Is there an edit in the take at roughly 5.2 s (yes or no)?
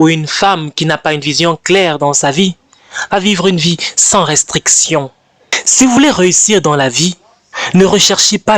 yes